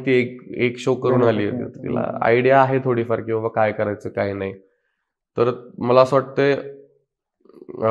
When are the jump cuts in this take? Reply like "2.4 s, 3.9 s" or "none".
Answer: none